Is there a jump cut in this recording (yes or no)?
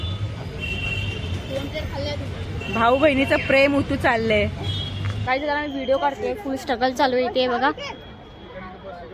yes